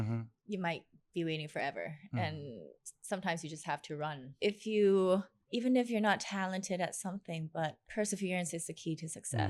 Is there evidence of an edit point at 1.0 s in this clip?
no; 3 cuts; at 4.3 s, 5.4 s, 7.8 s

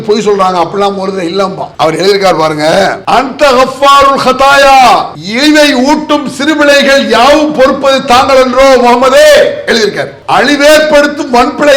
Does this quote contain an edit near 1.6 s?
yes; 4 cuts; at 1.6 s, 3.0 s, 5.2 s, 10.1 s

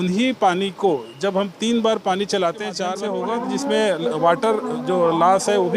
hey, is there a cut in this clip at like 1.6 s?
no; 1 cut; at 2.9 s

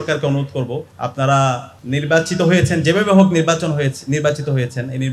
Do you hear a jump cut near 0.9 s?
yes; 2 cuts; at 0.9 s, 1.7 s

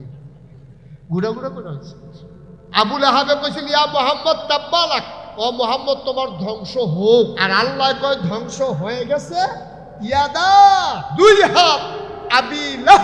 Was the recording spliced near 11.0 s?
yes; 3 cuts; at 5.2 s, 7.4 s, 11.0 s

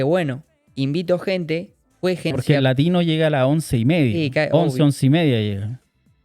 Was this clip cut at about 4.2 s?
no; 1 cut; at 2.3 s

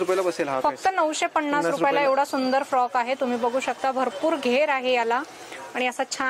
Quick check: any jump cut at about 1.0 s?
no; 0 cuts

